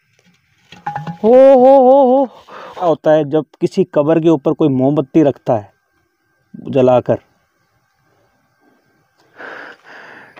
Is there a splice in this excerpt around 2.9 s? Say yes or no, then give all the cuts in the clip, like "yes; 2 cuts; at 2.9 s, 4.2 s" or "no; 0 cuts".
yes; 2 cuts; at 2.9 s, 9.4 s